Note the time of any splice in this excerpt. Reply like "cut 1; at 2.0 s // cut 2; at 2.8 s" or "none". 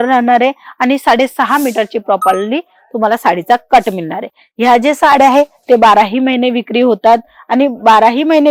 none